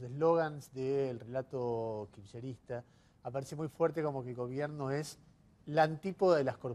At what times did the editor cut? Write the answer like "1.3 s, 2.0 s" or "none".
1.9 s